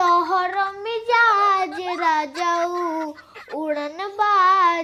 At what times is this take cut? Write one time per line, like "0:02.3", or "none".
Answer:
none